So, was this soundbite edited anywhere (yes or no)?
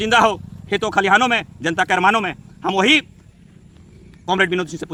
no